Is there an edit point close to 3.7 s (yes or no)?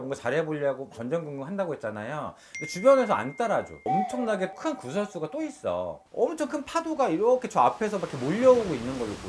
yes